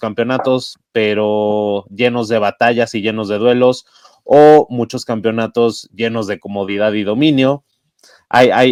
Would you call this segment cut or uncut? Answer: uncut